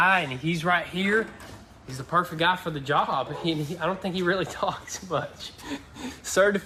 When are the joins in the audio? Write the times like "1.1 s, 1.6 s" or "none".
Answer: none